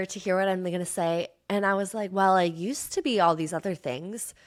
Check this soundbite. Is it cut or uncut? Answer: uncut